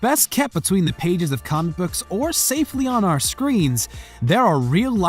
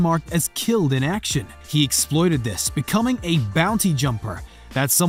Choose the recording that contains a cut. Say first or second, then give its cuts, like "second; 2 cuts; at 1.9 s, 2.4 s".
first; 1 cut; at 3.3 s